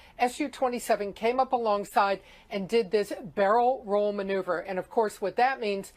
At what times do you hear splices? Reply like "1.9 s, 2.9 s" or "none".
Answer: 3.7 s